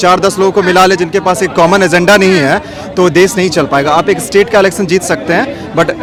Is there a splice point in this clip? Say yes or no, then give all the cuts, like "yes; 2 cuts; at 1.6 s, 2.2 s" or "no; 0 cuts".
no; 0 cuts